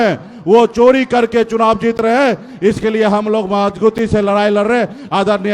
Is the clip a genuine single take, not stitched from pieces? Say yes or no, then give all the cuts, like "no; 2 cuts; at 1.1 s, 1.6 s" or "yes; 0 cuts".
yes; 0 cuts